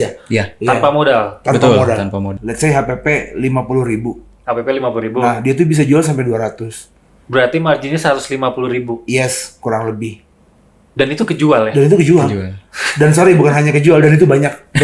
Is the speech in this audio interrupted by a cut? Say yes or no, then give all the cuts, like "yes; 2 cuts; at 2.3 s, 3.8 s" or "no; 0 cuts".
yes; 1 cut; at 2.4 s